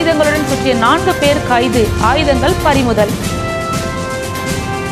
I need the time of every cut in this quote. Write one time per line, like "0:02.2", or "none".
0:03.1